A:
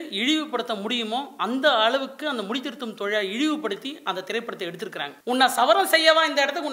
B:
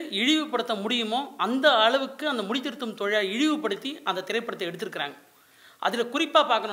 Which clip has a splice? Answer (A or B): A